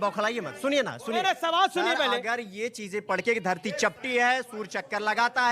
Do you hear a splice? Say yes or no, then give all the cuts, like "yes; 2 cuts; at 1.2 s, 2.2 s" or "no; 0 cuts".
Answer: yes; 1 cut; at 1.2 s